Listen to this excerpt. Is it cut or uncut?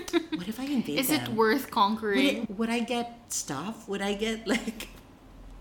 cut